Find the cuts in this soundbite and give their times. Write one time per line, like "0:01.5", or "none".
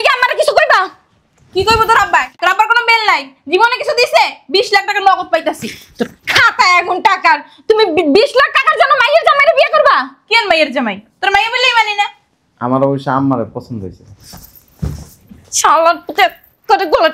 none